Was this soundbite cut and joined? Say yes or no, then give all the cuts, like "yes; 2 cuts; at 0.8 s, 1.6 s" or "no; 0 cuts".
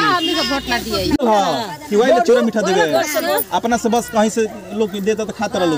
yes; 1 cut; at 1.2 s